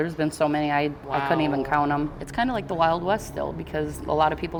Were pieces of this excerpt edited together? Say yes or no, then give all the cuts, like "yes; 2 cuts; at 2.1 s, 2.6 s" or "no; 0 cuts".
no; 0 cuts